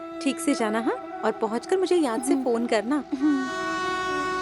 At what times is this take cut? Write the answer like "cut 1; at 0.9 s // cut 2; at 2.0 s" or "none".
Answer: cut 1; at 3.5 s